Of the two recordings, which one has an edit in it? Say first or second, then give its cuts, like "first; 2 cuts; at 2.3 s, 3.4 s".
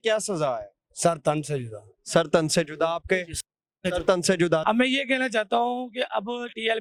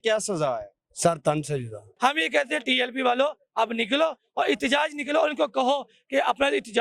second; 1 cut; at 1.9 s